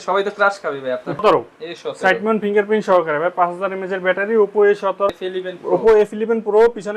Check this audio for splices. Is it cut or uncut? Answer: cut